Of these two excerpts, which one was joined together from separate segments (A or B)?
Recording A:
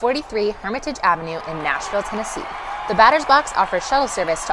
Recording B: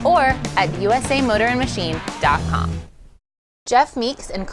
B